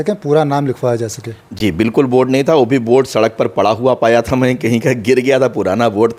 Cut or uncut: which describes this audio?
uncut